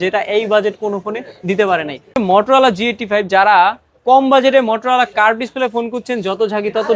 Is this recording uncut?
no; 1 cut; at 2.2 s

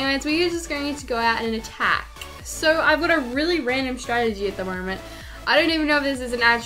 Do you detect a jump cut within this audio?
yes; 1 cut; at 2.1 s

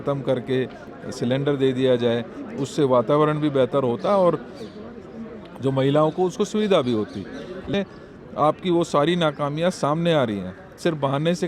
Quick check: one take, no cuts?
no; 1 cut; at 7.7 s

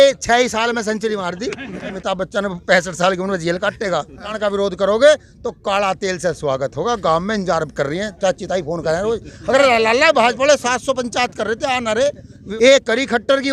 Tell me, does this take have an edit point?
yes; 3 cuts; at 2.0 s, 4.3 s, 12.4 s

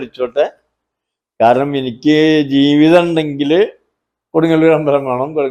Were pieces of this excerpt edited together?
no; 0 cuts

